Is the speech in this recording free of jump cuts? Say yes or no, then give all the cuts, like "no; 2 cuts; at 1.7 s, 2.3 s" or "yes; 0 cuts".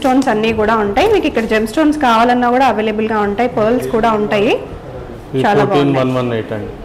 yes; 0 cuts